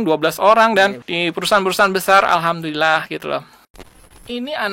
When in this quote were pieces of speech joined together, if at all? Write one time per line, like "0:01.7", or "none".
0:01.1
0:03.9

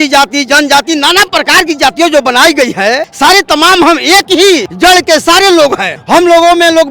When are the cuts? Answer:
0:03.1
0:04.7
0:05.9

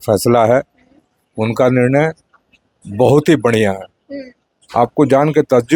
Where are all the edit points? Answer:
none

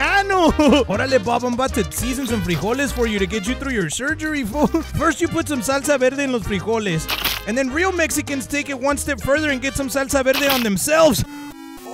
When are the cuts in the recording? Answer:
0:00.9
0:04.9

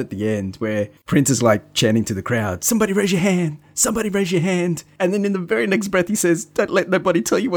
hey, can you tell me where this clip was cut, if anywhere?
0:01.0
0:04.8

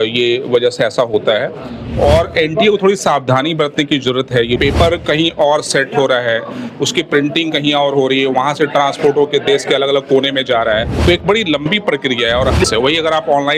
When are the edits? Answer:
0:04.6
0:10.9
0:12.6

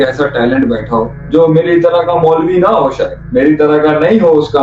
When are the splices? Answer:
0:01.2
0:03.1

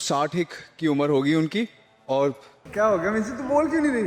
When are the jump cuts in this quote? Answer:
0:02.5

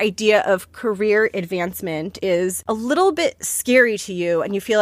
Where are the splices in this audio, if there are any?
0:02.2

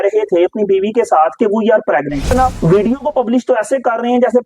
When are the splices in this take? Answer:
0:02.3

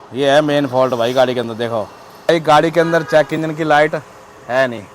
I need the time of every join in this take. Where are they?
0:02.3

